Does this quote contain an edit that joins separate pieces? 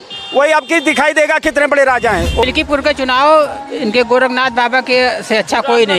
yes; 1 cut; at 2.4 s

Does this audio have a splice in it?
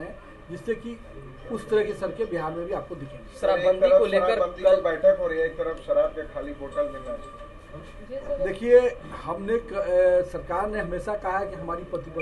no; 0 cuts

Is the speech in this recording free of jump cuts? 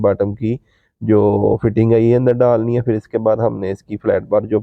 yes; 0 cuts

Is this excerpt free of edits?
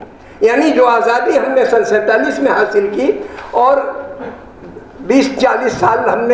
yes; 0 cuts

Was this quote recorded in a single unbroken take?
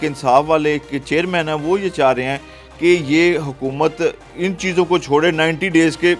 yes; 0 cuts

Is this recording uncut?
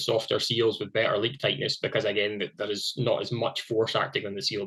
yes; 0 cuts

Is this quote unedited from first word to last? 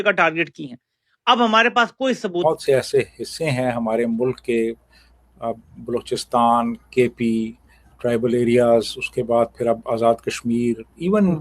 no; 1 cut; at 2.4 s

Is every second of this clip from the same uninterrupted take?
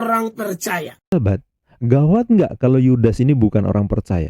no; 1 cut; at 1.1 s

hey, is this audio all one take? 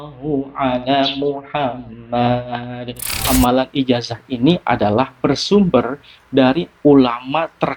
no; 1 cut; at 3.2 s

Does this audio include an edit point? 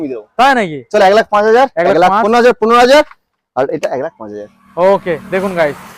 no; 0 cuts

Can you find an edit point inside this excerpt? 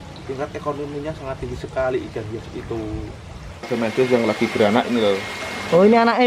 yes; 1 cut; at 3.7 s

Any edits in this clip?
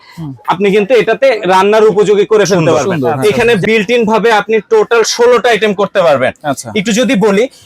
yes; 1 cut; at 3.1 s

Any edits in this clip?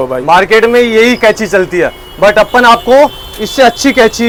no; 0 cuts

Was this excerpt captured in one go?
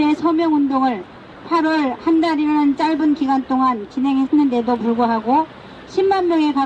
no; 1 cut; at 1.9 s

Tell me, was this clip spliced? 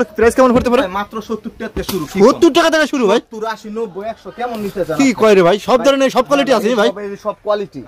no; 0 cuts

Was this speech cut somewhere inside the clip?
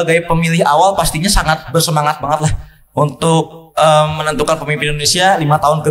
no; 0 cuts

